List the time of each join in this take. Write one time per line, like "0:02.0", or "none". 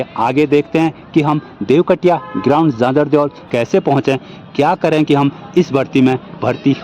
0:03.4